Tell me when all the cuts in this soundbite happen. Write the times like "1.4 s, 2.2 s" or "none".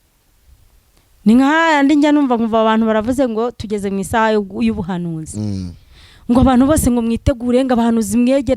none

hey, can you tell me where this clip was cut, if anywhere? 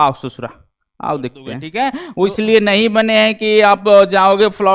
1.6 s

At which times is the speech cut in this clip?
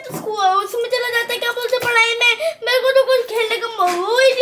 none

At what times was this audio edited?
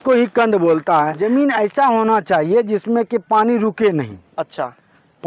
1.1 s

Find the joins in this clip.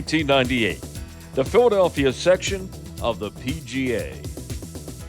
4.2 s

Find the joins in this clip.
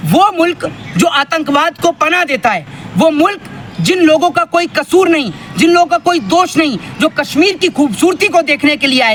none

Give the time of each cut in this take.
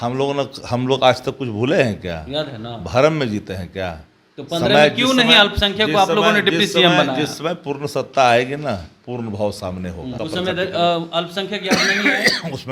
10.2 s

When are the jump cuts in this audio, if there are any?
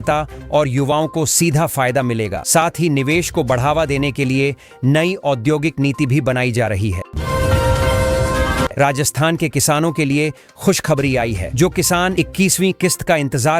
7.1 s, 8.7 s

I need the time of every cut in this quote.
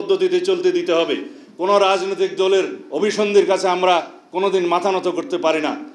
none

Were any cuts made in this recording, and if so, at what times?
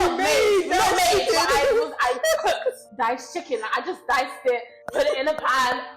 2.9 s, 4.8 s

